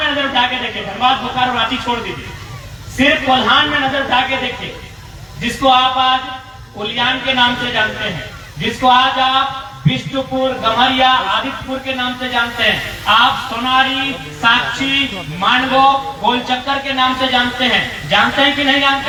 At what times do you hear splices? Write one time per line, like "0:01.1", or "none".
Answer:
none